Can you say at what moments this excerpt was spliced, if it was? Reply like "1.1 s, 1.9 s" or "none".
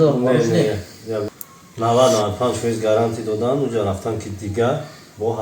1.3 s